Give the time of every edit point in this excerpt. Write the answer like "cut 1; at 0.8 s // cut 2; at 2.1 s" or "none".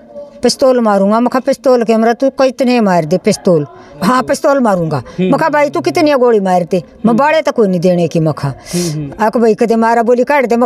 cut 1; at 3.9 s // cut 2; at 9.0 s